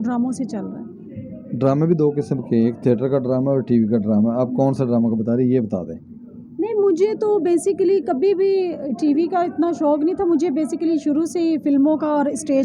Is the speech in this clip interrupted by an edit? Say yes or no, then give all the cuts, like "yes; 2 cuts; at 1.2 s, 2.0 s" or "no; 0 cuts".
no; 0 cuts